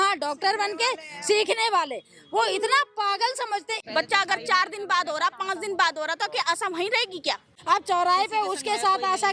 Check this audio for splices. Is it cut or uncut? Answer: cut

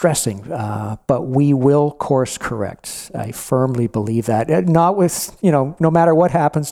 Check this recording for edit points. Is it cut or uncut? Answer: uncut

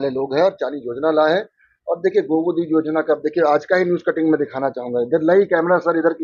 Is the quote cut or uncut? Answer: uncut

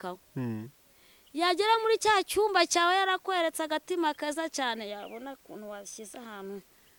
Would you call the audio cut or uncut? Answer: uncut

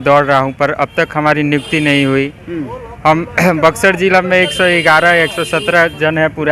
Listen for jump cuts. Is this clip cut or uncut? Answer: uncut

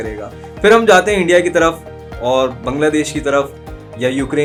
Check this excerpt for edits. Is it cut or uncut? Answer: uncut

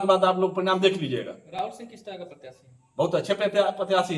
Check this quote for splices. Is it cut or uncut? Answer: uncut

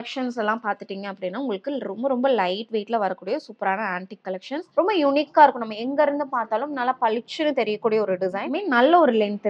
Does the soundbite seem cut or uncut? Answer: cut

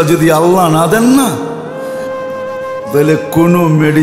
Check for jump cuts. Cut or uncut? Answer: cut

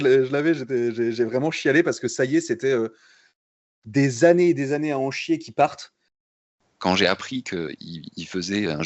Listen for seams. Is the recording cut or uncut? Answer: cut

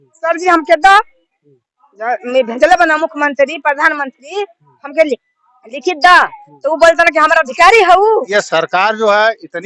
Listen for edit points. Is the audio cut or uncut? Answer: cut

